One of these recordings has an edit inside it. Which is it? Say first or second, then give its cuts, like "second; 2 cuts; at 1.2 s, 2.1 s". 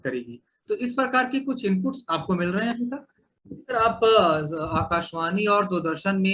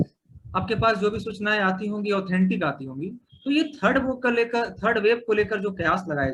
first; 1 cut; at 3.6 s